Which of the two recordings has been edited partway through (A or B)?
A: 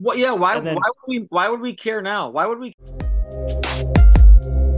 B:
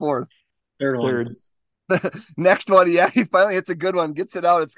A